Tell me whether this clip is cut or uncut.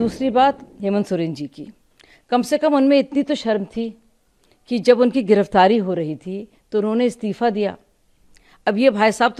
uncut